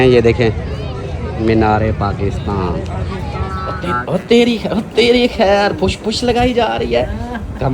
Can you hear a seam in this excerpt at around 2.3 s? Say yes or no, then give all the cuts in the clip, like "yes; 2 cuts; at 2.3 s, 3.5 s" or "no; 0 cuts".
no; 1 cut; at 3.7 s